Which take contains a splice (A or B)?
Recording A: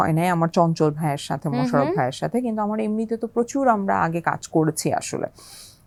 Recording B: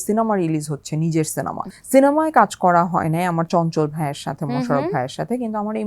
B